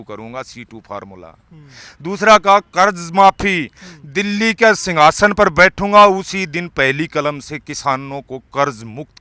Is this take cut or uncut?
uncut